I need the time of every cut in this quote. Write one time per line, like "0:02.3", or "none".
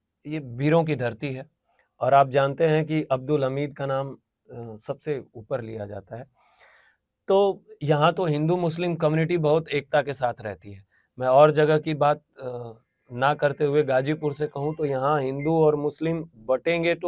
none